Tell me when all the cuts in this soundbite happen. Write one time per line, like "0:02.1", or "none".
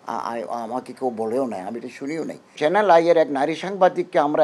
0:02.5